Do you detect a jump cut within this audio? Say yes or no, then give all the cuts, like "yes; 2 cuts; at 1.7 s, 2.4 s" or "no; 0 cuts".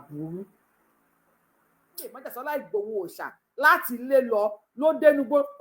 yes; 1 cut; at 2.1 s